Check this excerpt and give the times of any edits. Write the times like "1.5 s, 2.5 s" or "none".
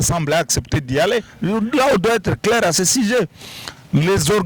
1.3 s